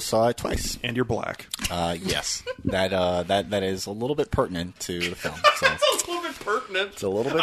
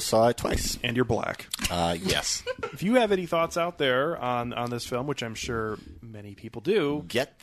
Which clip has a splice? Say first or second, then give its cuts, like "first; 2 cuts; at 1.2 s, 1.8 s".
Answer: second; 1 cut; at 2.7 s